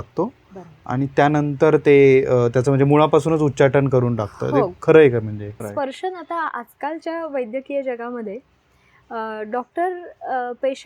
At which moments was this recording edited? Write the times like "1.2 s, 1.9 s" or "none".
5.6 s